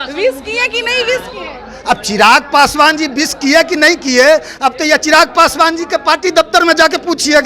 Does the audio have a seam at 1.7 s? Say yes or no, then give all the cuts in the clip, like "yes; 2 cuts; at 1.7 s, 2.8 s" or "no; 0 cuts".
no; 0 cuts